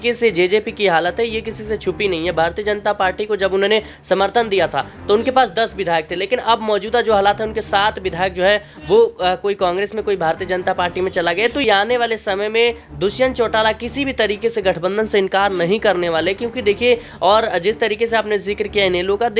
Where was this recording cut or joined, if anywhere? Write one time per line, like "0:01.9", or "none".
0:11.6

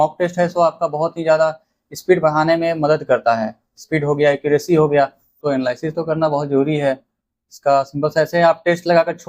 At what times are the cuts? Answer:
0:05.4

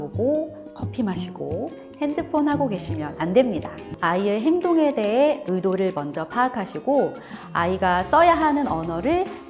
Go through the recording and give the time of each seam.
0:03.9

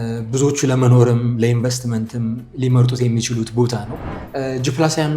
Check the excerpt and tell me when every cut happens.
0:04.2

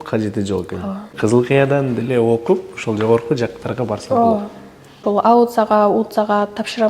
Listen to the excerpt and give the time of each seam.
0:01.1
0:05.0

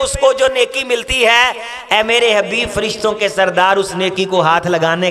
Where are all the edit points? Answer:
none

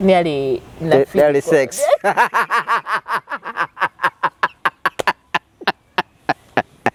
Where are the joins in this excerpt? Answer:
none

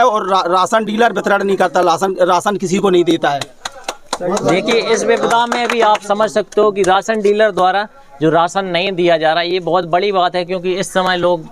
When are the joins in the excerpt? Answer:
none

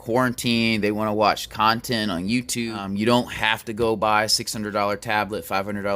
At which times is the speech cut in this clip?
0:02.8

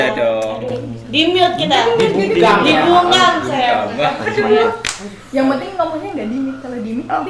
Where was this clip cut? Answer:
none

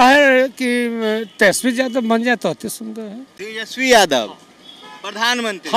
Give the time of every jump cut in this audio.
none

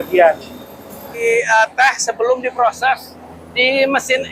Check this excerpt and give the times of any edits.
0:01.2

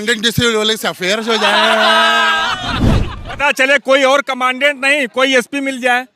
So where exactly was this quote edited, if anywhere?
none

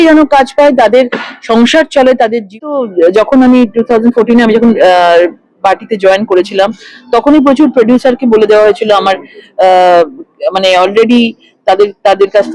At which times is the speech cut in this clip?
0:02.6

